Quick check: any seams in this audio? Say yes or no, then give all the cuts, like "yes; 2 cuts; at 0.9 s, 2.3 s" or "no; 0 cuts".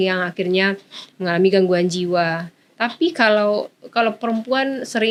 no; 0 cuts